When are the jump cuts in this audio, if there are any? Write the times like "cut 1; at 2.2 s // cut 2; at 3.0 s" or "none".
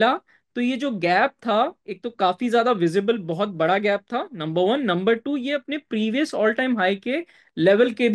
none

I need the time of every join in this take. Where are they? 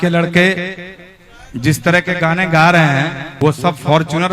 cut 1; at 3.2 s

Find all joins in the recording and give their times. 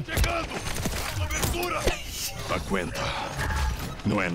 none

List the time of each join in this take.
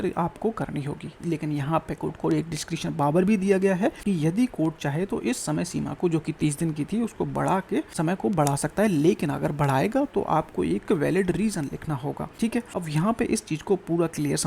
cut 1; at 4.0 s // cut 2; at 7.9 s // cut 3; at 12.6 s

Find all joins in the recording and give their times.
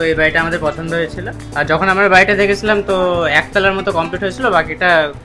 none

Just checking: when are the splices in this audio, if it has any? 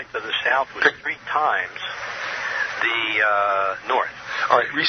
cut 1; at 4.0 s

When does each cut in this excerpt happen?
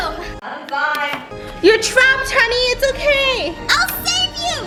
none

